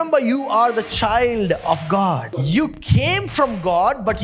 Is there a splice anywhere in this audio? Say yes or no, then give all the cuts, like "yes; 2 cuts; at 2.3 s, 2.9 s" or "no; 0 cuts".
yes; 1 cut; at 2.4 s